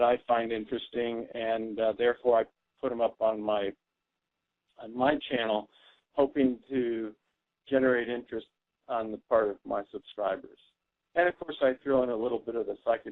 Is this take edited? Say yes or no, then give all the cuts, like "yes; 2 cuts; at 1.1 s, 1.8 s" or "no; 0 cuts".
yes; 1 cut; at 10.3 s